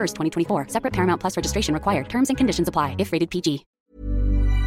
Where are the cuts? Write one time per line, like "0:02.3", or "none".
0:03.7

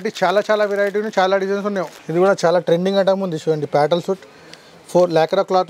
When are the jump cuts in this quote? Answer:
0:01.9

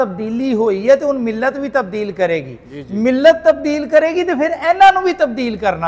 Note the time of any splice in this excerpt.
none

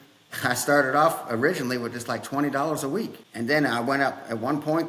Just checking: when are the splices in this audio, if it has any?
none

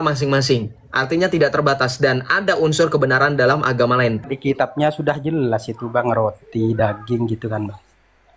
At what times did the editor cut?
0:04.3

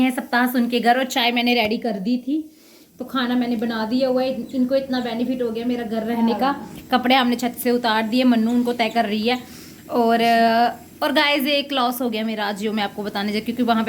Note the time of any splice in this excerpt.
none

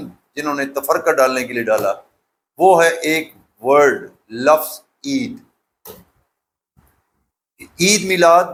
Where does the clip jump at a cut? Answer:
none

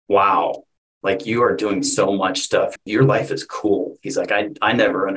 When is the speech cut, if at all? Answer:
0:02.8

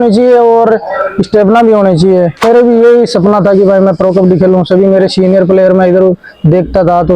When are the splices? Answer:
0:02.4

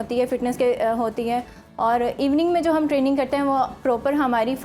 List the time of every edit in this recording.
none

